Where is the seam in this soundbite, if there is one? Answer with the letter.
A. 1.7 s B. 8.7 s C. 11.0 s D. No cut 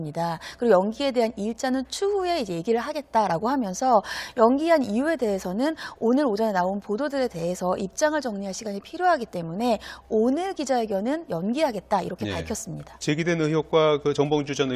A